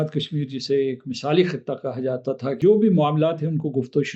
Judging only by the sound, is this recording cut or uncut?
cut